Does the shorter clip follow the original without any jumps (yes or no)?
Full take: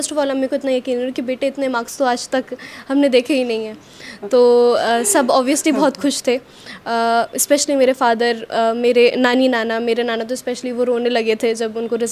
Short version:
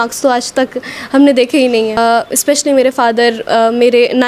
no